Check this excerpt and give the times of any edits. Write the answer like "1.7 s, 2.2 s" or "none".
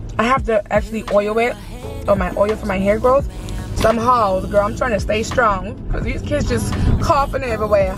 3.7 s